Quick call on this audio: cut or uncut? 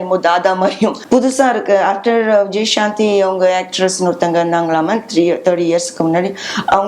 cut